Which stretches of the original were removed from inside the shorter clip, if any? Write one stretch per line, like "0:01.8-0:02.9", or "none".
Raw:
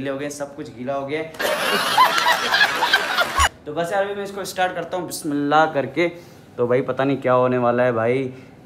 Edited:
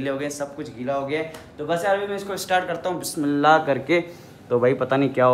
0:01.4-0:03.5